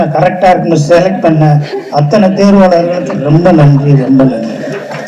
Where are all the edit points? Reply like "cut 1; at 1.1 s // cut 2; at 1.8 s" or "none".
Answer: none